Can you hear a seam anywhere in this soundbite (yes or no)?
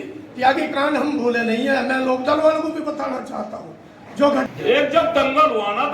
yes